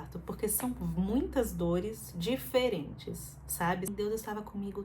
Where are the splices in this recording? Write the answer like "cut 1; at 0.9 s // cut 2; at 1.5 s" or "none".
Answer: cut 1; at 3.9 s